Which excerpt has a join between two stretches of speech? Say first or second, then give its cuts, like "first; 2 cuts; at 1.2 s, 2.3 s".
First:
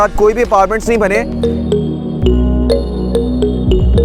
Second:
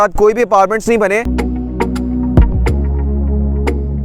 second; 1 cut; at 1.3 s